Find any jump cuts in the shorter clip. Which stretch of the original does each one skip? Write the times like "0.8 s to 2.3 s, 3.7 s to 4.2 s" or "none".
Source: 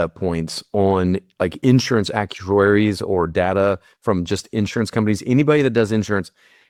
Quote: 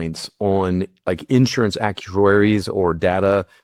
none

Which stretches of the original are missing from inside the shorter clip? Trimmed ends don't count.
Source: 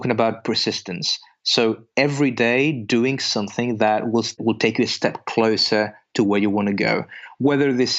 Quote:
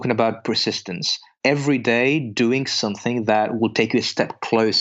1.3 s to 1.8 s, 4.1 s to 4.4 s

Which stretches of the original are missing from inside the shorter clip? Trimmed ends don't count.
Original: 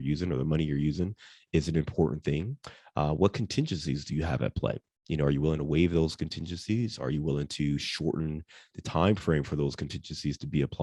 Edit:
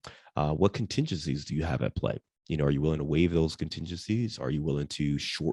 none

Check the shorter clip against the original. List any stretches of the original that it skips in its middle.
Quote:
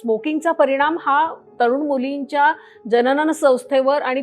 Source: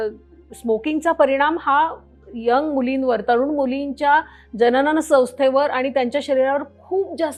2.1 s to 3.2 s

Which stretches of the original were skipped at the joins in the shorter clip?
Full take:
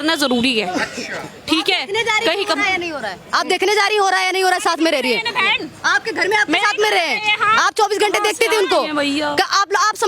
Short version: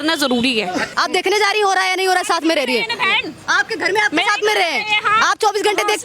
0.9 s to 3.3 s

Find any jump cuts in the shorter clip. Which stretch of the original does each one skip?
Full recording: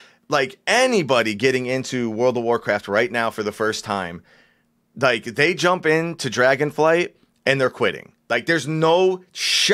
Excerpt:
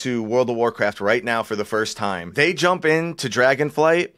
4.1 s to 5.3 s

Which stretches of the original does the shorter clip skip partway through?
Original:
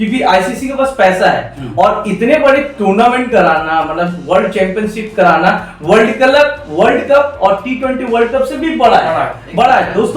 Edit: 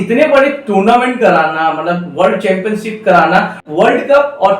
5.7 s to 6.6 s

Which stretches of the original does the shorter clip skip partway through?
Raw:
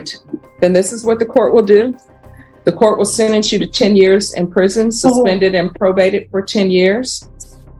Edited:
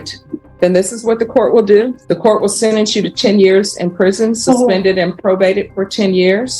2.0 s to 2.6 s

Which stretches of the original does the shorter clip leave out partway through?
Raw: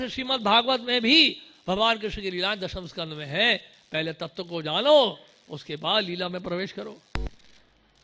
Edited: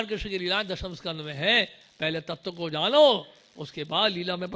none

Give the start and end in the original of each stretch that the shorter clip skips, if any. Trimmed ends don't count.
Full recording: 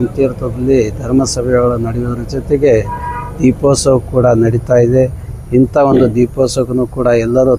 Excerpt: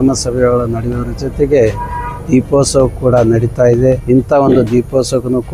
5.1 s to 5.5 s

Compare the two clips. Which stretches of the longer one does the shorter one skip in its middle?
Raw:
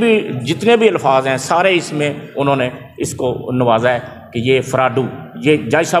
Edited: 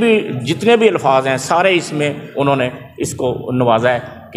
none

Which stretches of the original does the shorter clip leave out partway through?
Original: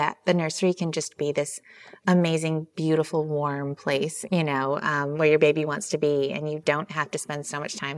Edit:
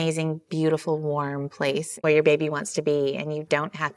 4.2 s to 5.1 s

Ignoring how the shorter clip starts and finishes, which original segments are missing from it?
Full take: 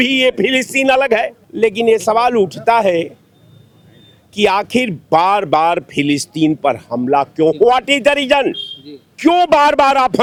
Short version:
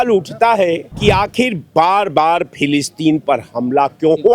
3.2 s to 4.3 s

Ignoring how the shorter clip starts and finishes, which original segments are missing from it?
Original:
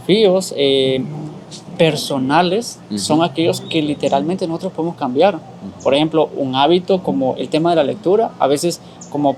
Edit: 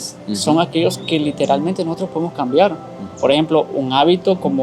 none

